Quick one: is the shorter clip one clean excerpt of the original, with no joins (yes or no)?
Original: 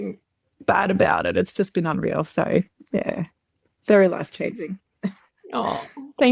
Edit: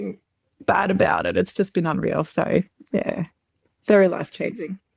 yes